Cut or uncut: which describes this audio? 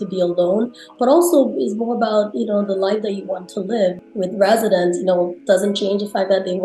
cut